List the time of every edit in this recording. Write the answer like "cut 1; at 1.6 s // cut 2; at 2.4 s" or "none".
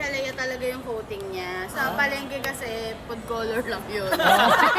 none